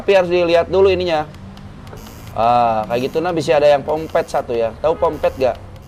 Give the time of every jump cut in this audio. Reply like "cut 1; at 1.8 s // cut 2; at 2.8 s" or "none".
none